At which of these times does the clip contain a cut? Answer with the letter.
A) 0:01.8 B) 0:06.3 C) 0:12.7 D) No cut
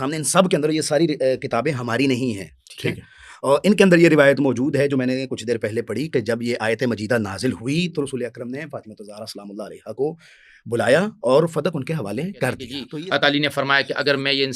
C